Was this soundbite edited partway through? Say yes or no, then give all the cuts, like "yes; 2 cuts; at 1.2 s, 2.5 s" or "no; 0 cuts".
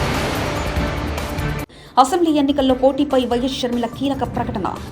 yes; 1 cut; at 1.5 s